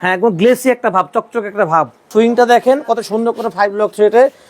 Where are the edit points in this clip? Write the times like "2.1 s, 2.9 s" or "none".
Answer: 2.1 s

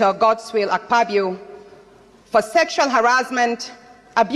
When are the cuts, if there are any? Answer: none

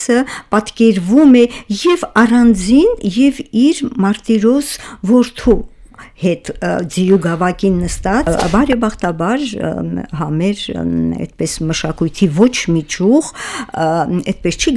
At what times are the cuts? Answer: 8.2 s

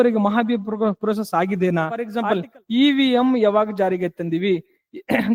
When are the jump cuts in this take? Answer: 2.1 s

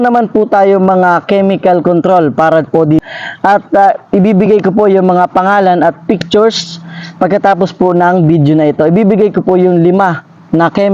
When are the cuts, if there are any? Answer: 3.0 s

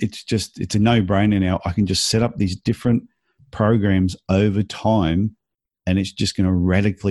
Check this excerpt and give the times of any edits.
none

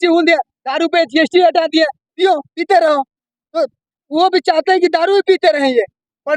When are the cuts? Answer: none

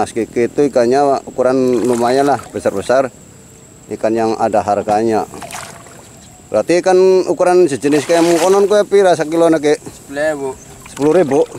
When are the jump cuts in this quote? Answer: none

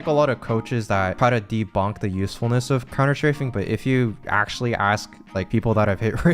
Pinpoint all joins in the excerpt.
1.1 s, 5.5 s

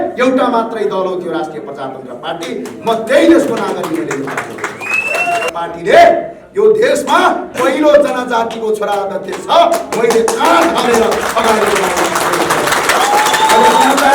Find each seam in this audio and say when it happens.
5.5 s

